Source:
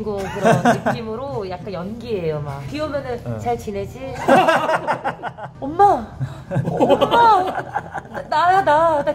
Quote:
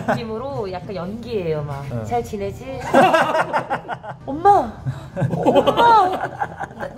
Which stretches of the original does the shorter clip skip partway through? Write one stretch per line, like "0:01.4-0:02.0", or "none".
0:02.7-0:03.2